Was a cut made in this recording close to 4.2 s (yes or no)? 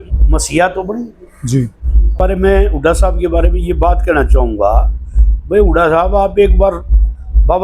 no